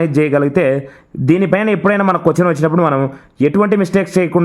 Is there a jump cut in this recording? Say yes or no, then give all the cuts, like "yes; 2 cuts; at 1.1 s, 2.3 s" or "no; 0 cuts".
no; 0 cuts